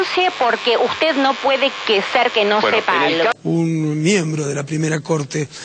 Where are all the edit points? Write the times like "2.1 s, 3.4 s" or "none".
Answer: 3.3 s